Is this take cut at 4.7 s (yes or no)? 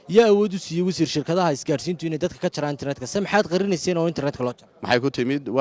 yes